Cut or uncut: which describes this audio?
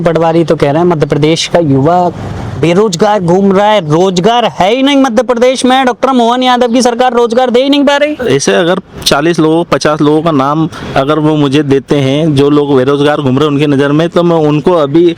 uncut